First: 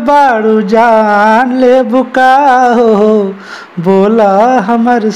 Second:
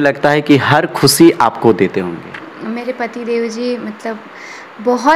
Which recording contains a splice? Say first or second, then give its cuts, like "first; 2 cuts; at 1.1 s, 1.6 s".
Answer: second; 1 cut; at 2.5 s